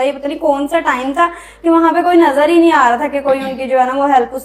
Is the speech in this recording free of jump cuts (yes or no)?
yes